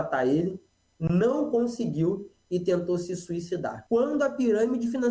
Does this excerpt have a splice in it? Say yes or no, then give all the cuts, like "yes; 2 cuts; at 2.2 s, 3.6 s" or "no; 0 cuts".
yes; 1 cut; at 3.7 s